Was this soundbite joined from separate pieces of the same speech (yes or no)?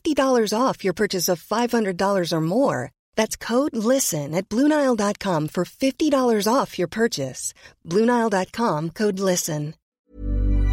yes